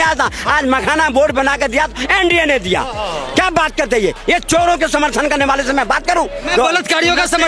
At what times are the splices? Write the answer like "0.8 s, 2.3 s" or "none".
6.5 s